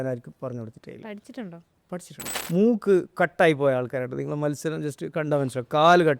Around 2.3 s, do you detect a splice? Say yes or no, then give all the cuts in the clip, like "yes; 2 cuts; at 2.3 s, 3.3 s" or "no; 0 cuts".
yes; 1 cut; at 2.3 s